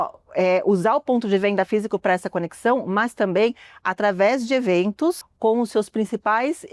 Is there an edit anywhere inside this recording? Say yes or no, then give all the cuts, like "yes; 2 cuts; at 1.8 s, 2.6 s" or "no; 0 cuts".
yes; 1 cut; at 5.3 s